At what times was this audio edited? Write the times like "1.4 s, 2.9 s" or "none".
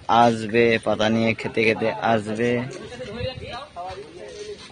none